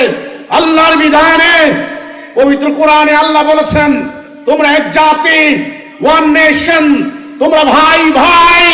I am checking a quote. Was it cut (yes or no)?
no